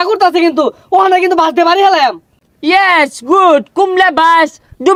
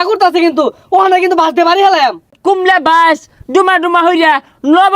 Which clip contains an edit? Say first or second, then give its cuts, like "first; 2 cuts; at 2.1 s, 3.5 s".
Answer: second; 1 cut; at 2.4 s